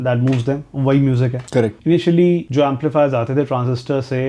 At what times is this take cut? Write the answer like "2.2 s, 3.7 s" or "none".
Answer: 1.6 s, 2.5 s